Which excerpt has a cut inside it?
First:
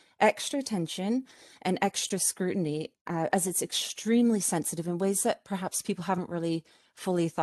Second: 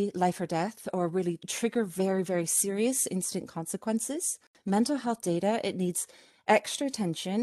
second; 2 cuts; at 1.5 s, 4.6 s

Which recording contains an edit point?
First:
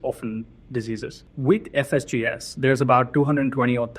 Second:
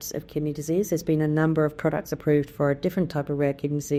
first; 1 cut; at 1.2 s

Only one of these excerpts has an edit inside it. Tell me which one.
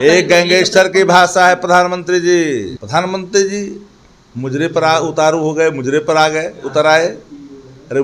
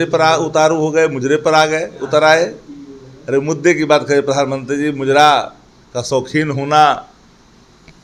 first; 1 cut; at 2.8 s

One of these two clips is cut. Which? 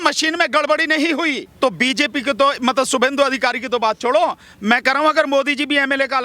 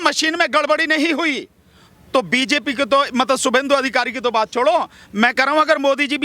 first; 1 cut; at 1.4 s

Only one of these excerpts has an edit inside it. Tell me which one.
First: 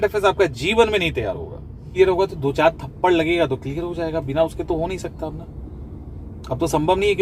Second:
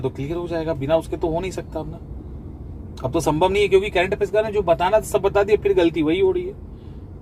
first; 1 cut; at 1.9 s

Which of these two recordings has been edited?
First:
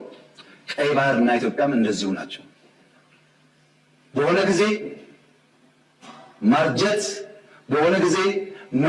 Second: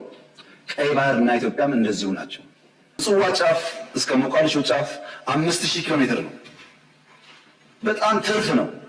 second; 1 cut; at 3.0 s

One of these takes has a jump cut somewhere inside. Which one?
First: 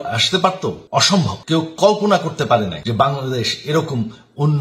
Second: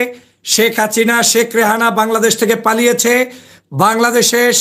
first; 2 cuts; at 1.1 s, 2.8 s

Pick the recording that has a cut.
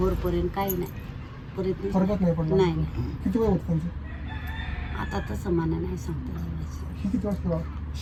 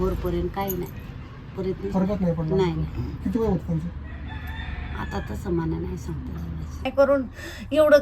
second; 1 cut; at 6.9 s

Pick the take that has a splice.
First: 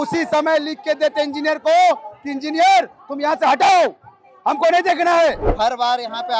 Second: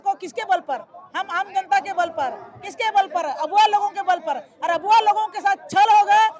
first; 1 cut; at 5.5 s

